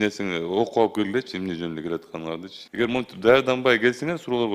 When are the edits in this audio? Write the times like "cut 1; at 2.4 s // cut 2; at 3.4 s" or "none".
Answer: cut 1; at 2.6 s

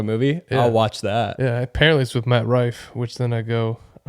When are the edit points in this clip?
cut 1; at 1.3 s

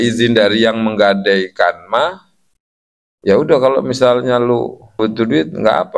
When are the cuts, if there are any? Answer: cut 1; at 5.0 s

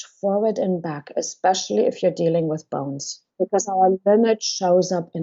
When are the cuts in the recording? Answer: cut 1; at 3.5 s

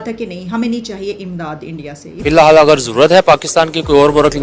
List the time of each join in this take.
cut 1; at 2.1 s

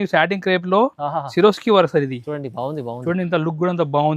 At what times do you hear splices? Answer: none

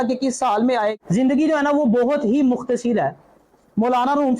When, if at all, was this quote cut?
cut 1; at 0.9 s

